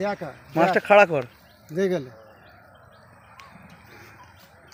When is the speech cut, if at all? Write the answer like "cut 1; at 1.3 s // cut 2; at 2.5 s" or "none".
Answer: none